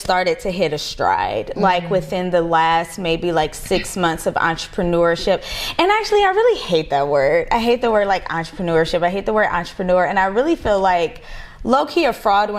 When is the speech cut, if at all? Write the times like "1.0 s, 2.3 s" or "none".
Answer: none